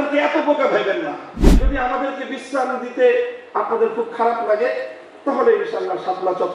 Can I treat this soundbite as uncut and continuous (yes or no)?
no